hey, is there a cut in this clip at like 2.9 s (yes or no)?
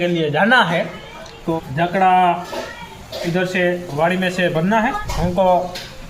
no